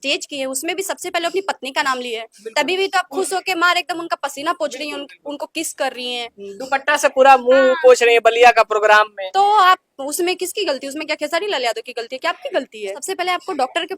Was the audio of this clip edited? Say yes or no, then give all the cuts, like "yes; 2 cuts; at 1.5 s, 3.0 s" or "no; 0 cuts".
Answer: yes; 1 cut; at 13.0 s